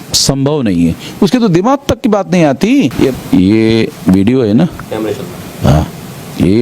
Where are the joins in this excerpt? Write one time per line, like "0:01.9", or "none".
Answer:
0:03.2